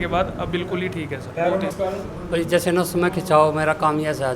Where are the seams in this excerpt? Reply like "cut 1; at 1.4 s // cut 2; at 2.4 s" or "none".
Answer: cut 1; at 1.7 s

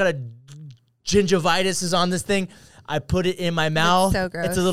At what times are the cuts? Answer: none

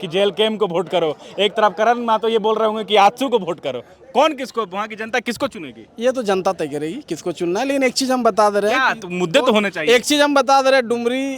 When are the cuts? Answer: none

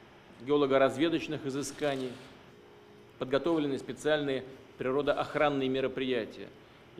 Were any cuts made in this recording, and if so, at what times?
cut 1; at 5.6 s

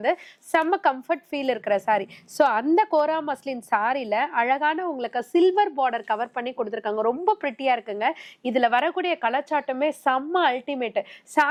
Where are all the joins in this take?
none

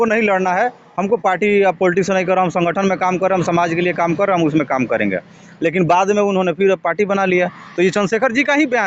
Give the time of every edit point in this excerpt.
none

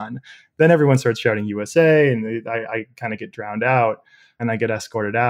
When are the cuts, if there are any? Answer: cut 1; at 4.4 s

